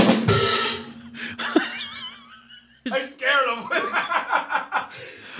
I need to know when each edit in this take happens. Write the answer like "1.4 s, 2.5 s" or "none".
2.8 s